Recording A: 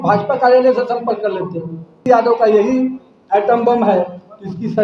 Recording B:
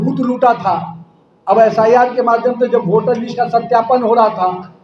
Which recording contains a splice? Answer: A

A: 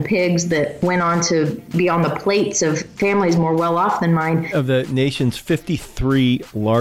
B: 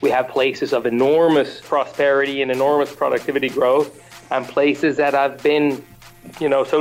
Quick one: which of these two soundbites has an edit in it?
A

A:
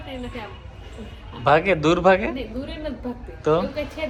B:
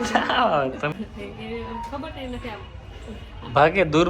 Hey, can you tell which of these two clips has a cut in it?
B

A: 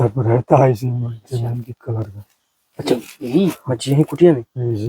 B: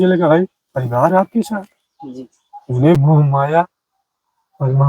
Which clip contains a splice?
B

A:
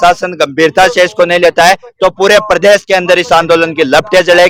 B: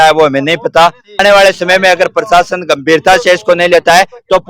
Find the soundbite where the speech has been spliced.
B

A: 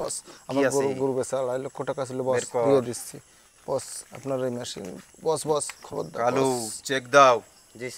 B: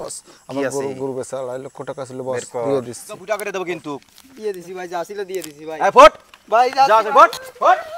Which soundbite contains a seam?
B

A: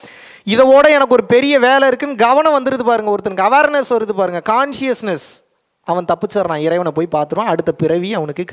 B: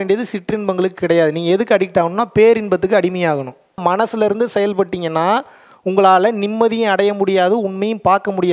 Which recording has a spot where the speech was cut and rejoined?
B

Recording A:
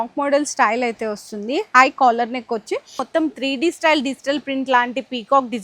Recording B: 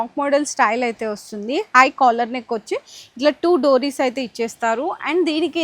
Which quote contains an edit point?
A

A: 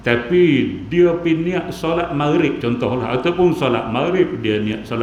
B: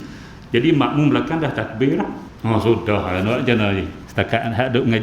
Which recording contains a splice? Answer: B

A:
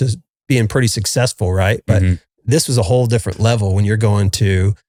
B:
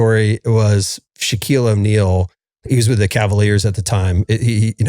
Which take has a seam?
B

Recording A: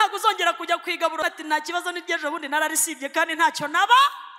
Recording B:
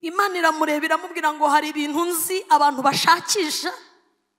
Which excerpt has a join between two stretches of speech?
A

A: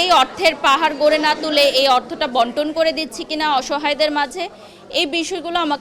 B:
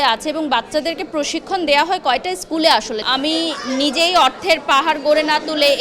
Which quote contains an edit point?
B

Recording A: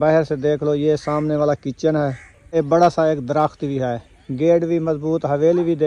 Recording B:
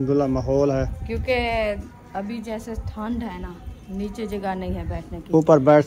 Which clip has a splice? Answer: A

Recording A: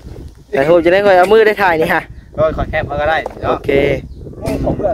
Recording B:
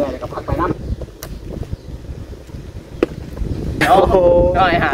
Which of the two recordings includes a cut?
B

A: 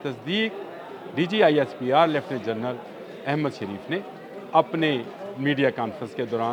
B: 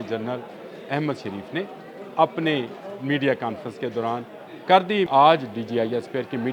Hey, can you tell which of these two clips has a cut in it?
B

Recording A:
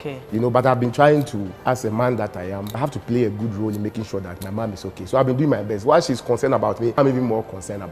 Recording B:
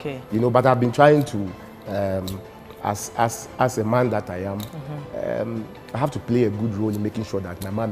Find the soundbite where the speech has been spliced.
A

